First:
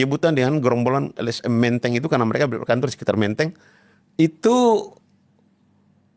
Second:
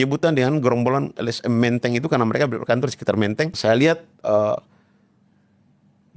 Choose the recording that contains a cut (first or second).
second